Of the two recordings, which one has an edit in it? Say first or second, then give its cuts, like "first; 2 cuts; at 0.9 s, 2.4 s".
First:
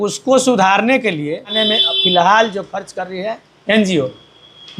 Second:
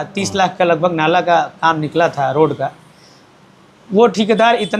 first; 1 cut; at 1.6 s